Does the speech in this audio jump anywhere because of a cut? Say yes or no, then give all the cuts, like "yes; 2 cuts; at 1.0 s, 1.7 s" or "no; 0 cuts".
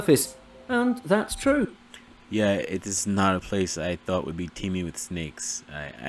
no; 0 cuts